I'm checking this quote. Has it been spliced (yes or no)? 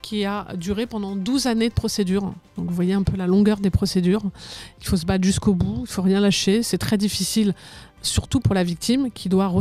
no